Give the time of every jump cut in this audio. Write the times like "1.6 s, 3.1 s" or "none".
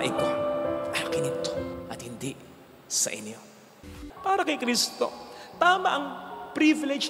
3.9 s